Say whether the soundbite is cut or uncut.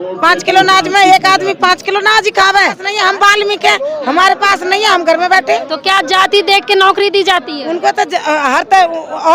cut